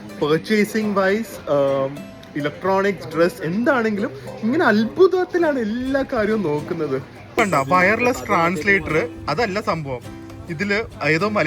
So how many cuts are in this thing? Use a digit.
1